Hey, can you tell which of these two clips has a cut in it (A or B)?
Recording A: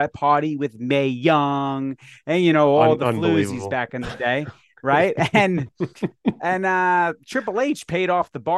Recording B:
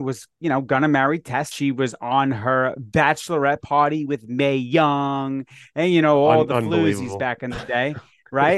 B